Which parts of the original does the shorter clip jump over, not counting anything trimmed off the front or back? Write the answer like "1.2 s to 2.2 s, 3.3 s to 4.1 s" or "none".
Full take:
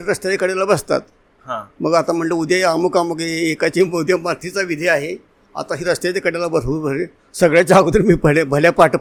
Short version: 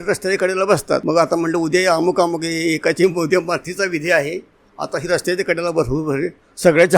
1.0 s to 1.8 s